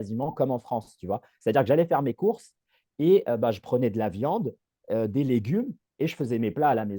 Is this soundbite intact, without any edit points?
yes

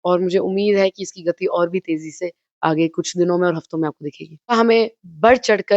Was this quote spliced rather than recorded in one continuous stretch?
yes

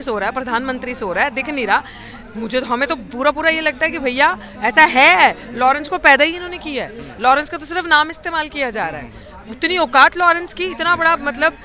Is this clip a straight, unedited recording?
yes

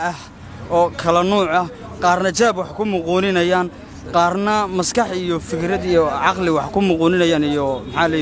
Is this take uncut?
yes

